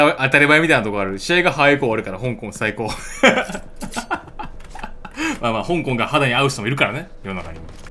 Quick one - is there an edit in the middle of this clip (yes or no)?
no